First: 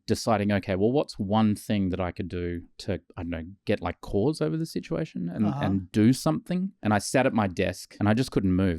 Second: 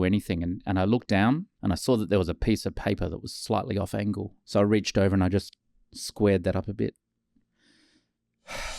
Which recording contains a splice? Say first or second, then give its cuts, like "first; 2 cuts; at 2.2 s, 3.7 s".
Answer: first; 2 cuts; at 6.7 s, 7.8 s